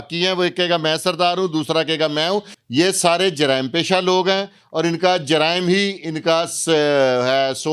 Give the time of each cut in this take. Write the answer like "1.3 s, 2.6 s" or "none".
2.6 s